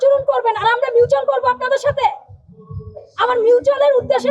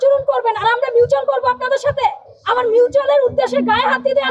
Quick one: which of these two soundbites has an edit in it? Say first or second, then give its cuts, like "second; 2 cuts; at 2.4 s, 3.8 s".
second; 1 cut; at 2.3 s